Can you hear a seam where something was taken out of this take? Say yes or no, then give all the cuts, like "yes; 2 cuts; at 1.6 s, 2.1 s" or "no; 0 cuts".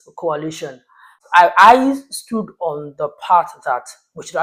yes; 1 cut; at 1.2 s